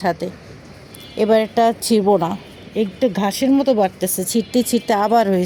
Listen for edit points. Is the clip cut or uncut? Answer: uncut